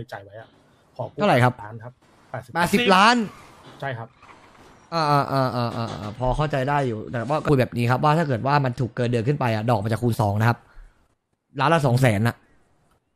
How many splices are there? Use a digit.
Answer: 1